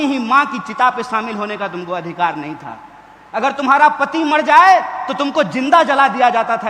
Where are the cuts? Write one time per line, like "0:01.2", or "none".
none